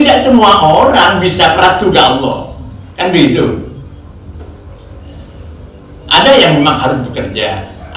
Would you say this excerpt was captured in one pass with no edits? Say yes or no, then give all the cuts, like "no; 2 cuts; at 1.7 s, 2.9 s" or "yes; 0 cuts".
yes; 0 cuts